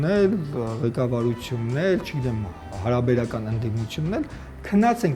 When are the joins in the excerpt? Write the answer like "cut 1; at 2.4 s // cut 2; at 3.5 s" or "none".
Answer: none